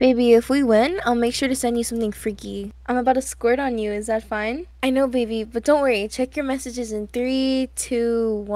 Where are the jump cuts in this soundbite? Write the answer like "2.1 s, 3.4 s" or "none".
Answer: 2.7 s, 4.6 s